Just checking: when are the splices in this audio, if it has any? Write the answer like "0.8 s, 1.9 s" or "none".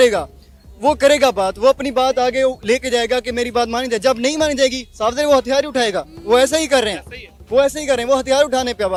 none